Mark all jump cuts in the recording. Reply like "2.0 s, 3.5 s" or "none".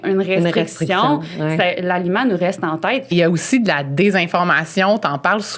3.1 s